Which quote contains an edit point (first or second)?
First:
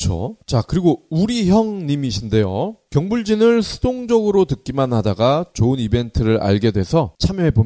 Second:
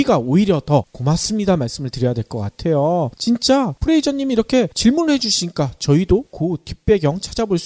second